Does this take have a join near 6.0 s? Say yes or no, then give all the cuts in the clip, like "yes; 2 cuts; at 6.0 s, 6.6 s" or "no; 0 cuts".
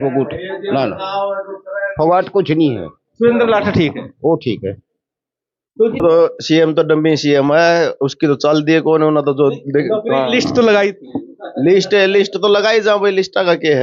yes; 1 cut; at 6.0 s